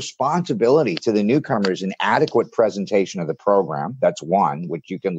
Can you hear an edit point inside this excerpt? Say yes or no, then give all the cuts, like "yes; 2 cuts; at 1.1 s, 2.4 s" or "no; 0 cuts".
no; 0 cuts